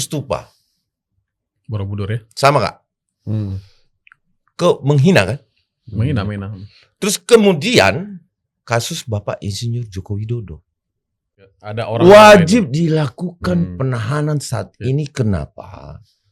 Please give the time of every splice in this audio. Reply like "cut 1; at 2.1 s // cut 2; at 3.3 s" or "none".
cut 1; at 11.6 s